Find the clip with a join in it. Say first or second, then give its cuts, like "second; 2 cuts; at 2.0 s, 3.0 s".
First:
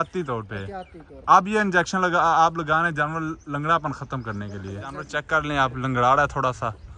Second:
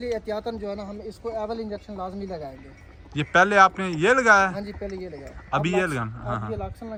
first; 1 cut; at 5.1 s